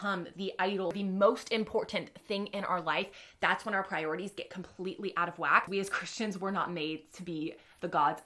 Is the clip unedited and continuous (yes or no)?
no